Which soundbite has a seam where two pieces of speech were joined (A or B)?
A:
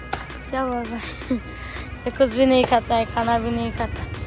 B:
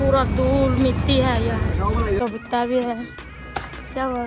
B